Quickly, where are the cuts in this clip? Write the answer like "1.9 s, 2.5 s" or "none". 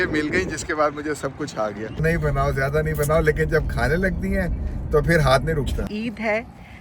2.0 s, 5.8 s